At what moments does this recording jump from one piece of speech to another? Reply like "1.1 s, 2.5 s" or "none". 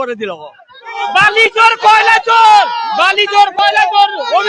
0.9 s